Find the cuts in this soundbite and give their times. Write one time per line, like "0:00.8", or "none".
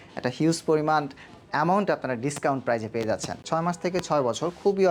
0:03.4